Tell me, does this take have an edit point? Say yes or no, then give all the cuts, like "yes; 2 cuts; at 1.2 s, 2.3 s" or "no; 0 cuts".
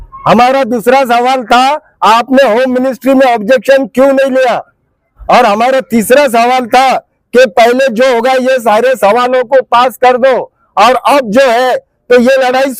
no; 0 cuts